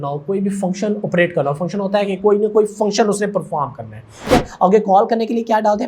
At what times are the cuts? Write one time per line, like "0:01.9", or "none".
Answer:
0:04.3